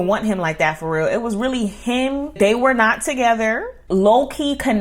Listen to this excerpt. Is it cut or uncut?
cut